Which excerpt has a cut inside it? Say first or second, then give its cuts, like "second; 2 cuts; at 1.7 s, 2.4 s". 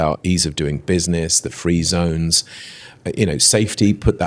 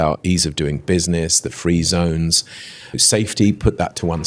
second; 1 cut; at 3.0 s